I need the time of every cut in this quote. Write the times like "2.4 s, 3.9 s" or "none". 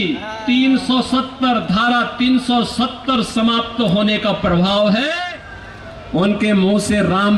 5.2 s